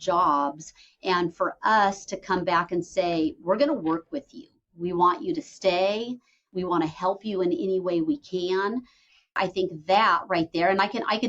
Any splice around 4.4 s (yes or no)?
no